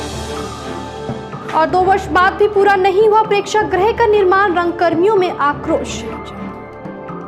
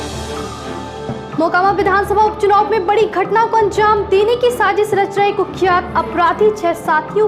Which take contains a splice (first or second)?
second